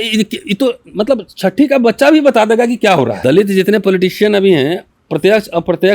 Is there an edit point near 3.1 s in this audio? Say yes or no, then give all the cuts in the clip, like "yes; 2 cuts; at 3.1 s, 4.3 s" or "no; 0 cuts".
yes; 1 cut; at 3.1 s